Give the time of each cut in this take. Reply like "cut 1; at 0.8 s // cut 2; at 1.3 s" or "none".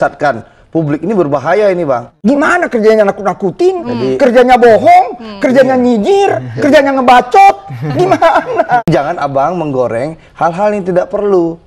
cut 1; at 2.1 s // cut 2; at 8.8 s